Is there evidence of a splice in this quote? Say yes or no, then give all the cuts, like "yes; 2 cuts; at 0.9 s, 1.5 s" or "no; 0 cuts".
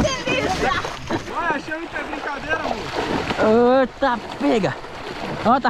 yes; 1 cut; at 1.2 s